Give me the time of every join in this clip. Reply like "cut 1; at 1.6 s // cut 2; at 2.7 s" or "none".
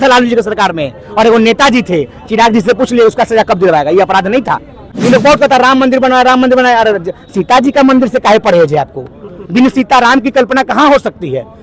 cut 1; at 5.0 s